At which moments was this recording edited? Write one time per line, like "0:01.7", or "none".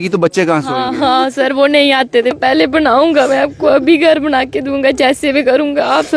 0:02.3